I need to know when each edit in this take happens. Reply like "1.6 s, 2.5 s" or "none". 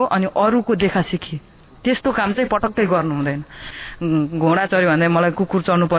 3.8 s